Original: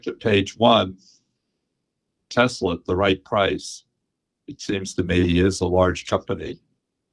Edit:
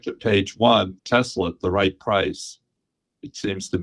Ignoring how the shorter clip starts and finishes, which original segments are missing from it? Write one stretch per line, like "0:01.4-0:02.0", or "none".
0:01.0-0:02.2